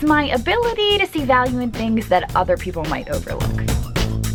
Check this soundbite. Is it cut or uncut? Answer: uncut